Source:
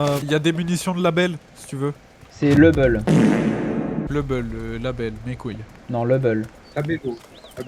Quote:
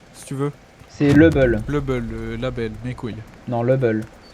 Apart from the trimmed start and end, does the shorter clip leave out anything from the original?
yes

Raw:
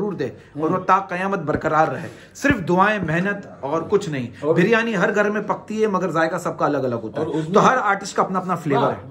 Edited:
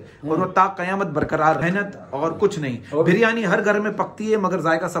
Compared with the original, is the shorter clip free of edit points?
no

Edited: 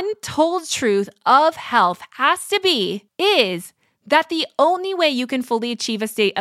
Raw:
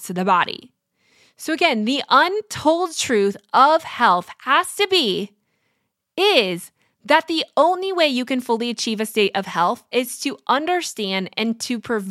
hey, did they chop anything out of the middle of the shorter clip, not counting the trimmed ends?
yes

